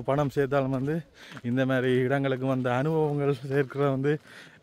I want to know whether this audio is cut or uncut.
uncut